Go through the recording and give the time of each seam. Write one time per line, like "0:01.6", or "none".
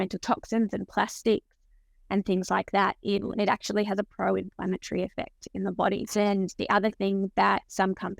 0:03.2
0:06.1